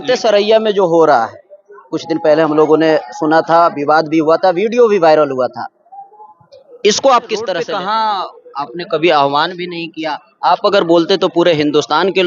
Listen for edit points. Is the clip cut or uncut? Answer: cut